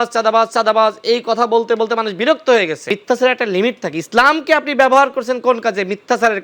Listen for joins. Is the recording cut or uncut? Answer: cut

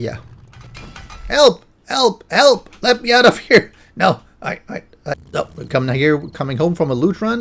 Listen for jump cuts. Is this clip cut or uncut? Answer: cut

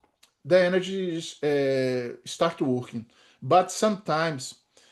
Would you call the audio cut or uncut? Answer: uncut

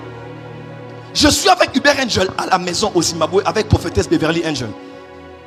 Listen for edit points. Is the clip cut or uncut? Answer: uncut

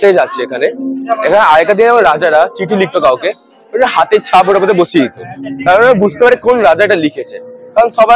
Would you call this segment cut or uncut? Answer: uncut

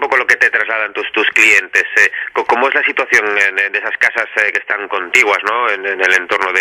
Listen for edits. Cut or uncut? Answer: cut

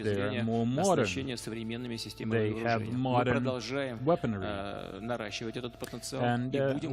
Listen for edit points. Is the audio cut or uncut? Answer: cut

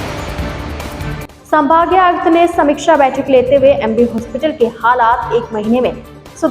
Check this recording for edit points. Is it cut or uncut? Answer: cut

